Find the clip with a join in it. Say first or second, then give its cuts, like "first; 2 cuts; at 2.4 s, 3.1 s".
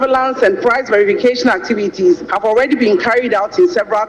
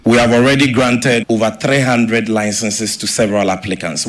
second; 1 cut; at 1.2 s